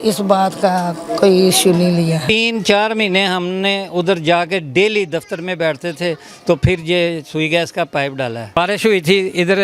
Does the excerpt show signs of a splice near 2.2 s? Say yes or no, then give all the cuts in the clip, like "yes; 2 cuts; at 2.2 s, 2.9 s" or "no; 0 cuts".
yes; 2 cuts; at 2.2 s, 8.6 s